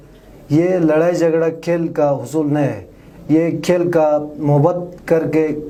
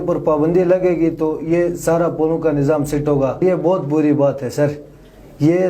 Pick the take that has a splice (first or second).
second